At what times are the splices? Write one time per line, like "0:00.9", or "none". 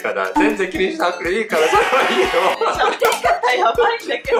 none